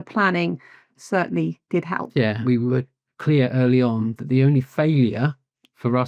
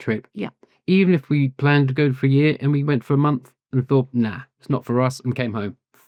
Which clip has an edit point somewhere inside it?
first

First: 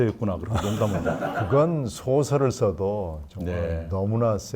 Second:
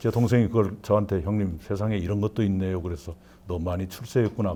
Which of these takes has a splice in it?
first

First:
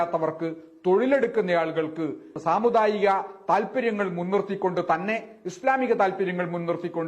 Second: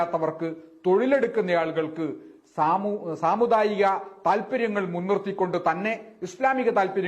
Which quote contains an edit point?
first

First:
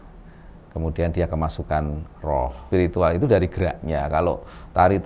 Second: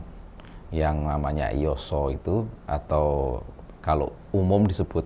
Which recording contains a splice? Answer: first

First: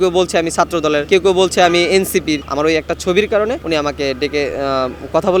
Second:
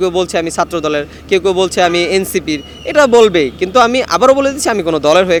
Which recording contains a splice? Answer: first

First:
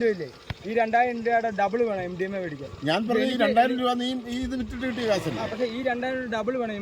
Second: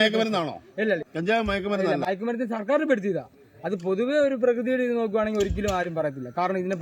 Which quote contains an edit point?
second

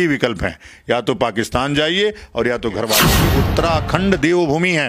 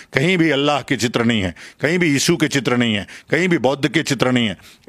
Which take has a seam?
first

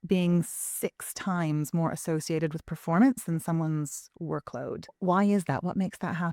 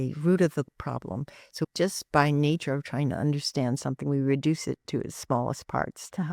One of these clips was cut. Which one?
first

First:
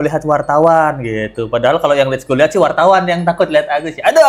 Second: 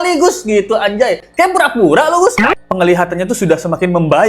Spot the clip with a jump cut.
second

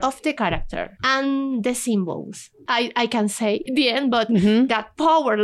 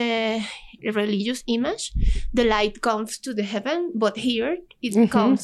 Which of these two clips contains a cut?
first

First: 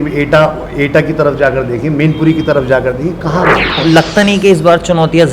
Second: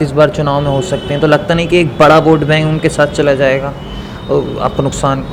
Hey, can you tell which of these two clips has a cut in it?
first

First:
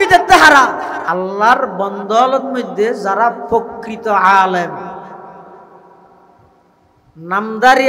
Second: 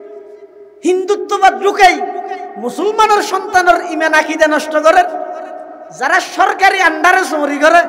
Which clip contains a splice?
first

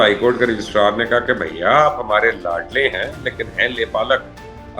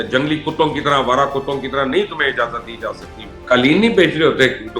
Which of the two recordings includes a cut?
second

